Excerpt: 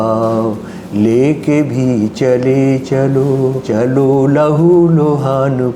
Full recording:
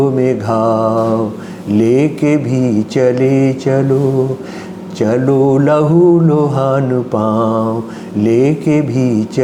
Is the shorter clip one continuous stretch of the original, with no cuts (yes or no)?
no